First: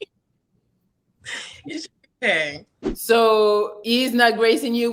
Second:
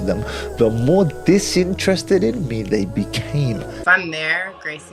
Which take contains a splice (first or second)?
second